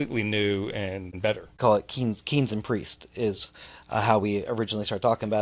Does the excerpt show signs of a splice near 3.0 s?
no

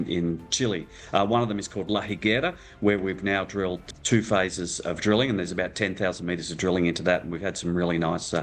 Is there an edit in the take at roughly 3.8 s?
yes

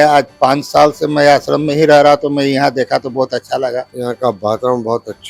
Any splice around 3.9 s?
yes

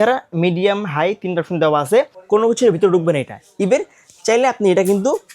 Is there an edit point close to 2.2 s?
yes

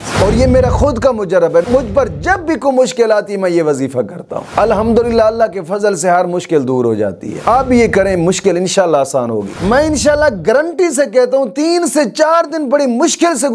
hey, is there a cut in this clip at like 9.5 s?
yes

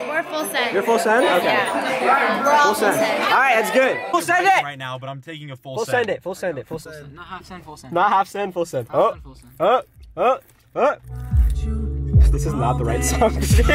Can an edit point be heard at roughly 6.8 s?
yes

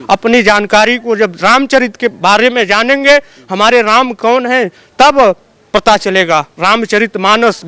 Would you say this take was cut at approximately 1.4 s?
no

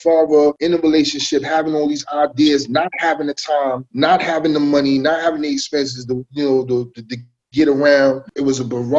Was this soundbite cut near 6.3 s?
no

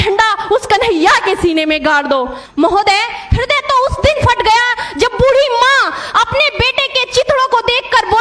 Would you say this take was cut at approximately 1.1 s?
no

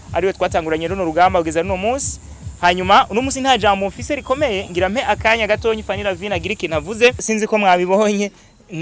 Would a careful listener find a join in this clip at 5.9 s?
no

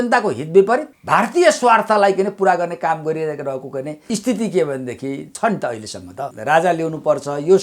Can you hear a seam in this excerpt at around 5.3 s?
yes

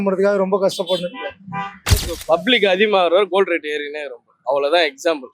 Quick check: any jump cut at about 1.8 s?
yes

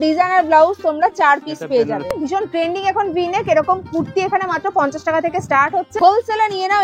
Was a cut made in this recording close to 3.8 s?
no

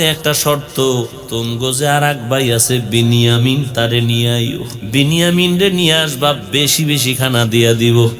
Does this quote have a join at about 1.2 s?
yes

